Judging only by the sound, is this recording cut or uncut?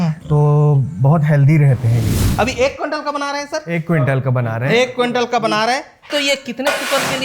cut